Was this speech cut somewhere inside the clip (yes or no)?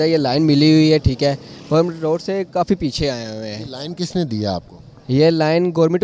no